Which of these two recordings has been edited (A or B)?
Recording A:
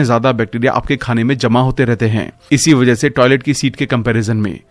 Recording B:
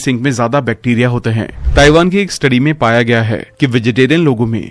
B